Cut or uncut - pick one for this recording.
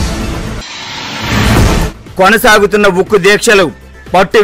uncut